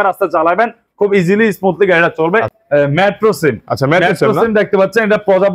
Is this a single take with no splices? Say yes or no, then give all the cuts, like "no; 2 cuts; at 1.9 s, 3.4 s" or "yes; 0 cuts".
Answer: no; 1 cut; at 2.5 s